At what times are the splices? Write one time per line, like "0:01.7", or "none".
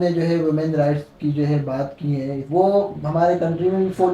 0:02.4